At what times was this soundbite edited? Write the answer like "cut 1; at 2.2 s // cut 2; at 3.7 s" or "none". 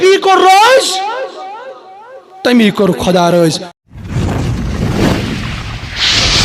cut 1; at 3.9 s